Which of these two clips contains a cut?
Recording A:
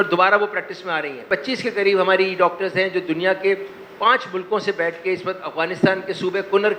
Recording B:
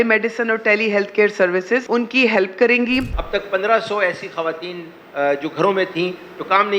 B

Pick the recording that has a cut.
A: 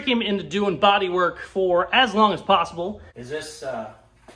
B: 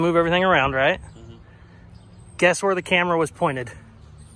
A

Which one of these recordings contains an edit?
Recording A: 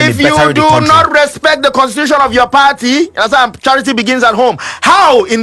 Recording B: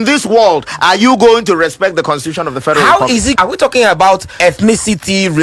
B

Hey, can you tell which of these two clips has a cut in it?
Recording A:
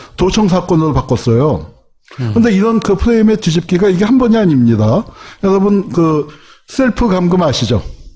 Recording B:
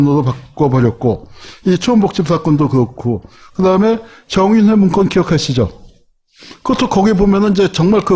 B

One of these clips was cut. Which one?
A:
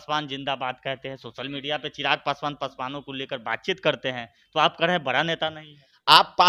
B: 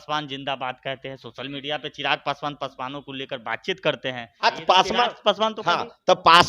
B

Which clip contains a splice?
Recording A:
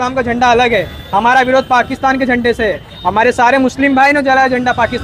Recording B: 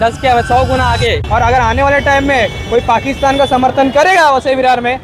B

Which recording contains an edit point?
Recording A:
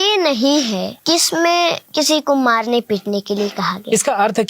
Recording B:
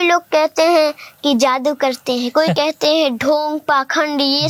A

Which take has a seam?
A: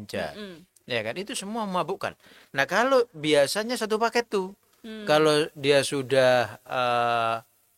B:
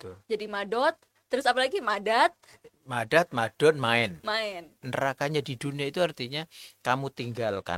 B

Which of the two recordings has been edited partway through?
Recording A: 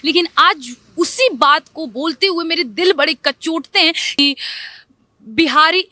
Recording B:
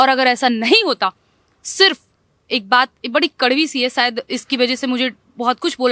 A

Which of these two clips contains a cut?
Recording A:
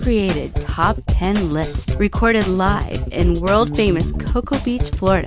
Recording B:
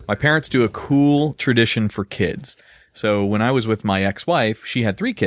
B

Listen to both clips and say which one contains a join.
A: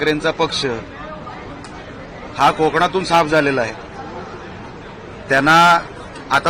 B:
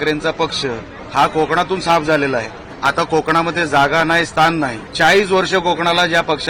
B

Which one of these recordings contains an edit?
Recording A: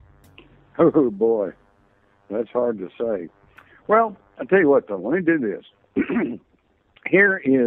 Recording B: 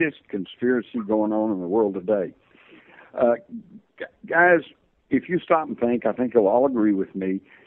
A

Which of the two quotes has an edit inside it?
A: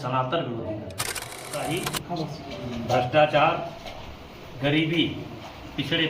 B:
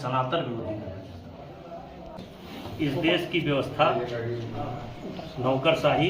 A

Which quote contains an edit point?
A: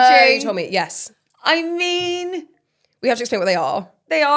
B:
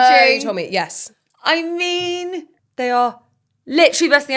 B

